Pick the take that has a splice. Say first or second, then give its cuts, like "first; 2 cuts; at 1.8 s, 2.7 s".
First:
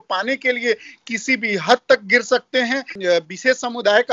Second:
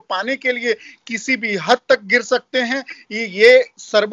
first; 1 cut; at 2.9 s